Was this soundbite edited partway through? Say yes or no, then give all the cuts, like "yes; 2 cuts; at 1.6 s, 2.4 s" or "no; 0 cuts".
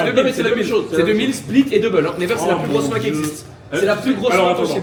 no; 0 cuts